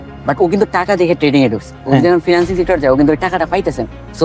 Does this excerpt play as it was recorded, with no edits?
yes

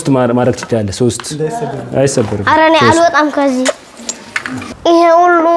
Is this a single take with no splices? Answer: no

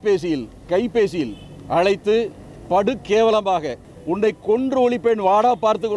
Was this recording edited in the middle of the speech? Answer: yes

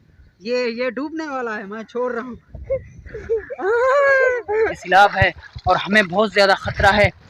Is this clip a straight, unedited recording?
no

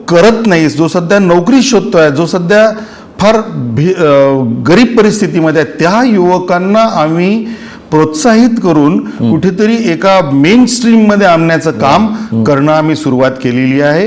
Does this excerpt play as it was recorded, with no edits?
yes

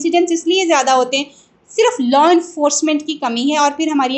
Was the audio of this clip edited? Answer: no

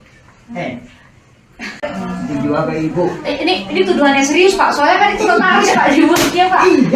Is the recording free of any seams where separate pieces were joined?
no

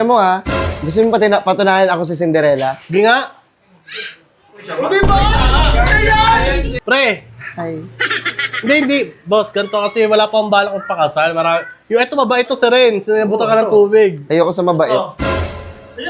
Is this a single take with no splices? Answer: no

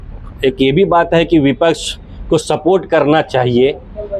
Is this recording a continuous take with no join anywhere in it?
yes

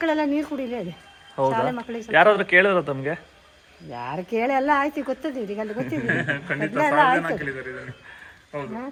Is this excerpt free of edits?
yes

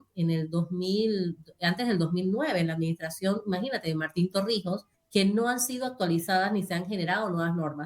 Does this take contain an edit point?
yes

